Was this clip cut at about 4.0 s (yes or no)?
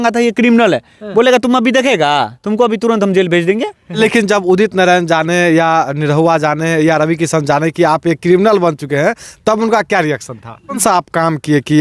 yes